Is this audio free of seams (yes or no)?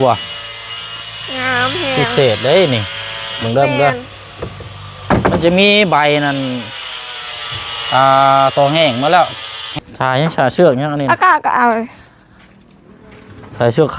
no